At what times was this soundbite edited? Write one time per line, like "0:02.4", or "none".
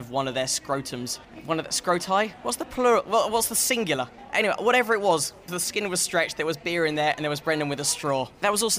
none